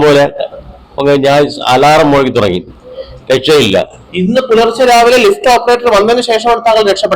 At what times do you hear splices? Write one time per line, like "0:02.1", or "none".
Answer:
0:04.1